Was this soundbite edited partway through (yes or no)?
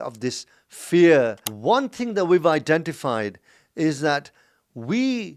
yes